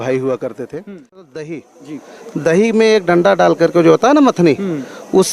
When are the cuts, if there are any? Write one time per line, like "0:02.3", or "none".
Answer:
0:01.3